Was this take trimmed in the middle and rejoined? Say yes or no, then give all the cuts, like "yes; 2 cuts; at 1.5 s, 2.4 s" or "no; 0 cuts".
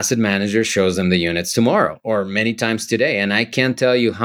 no; 0 cuts